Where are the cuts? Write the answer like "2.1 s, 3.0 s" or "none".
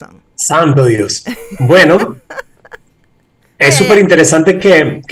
none